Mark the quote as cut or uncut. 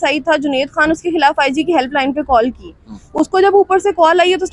uncut